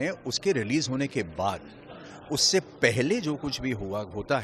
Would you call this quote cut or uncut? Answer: uncut